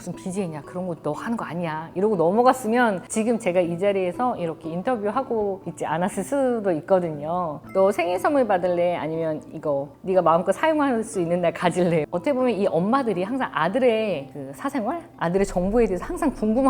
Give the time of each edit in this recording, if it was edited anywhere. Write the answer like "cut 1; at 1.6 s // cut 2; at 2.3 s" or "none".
cut 1; at 7.7 s // cut 2; at 12.1 s